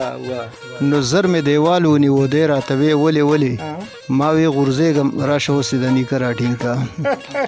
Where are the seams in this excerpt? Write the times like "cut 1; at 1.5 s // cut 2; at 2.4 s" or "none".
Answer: none

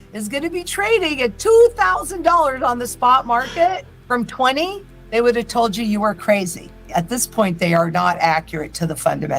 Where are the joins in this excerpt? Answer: cut 1; at 3.9 s // cut 2; at 6.8 s

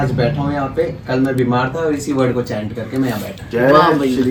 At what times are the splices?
none

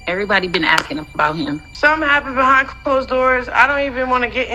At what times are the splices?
cut 1; at 1.7 s

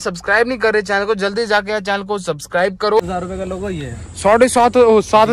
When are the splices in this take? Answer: cut 1; at 3.1 s

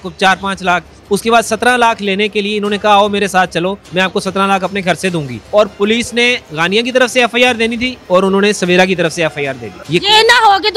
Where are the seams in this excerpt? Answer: cut 1; at 0.9 s // cut 2; at 3.8 s // cut 3; at 5.3 s // cut 4; at 7.9 s // cut 5; at 9.7 s

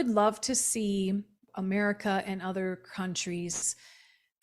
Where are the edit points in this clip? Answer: cut 1; at 1.4 s

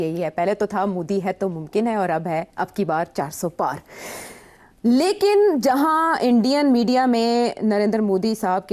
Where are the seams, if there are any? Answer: none

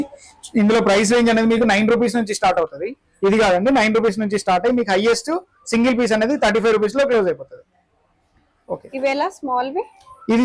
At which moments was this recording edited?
none

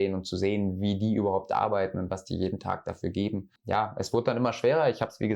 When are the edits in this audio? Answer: cut 1; at 3.5 s

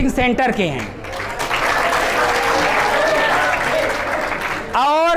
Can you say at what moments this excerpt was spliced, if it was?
none

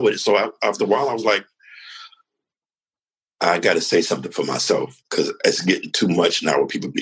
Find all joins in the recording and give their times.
none

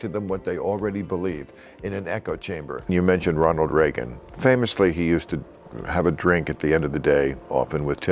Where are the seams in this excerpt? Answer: cut 1; at 2.9 s

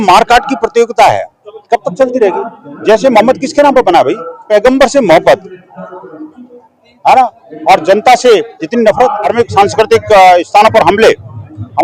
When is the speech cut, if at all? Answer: cut 1; at 4.4 s // cut 2; at 9.3 s

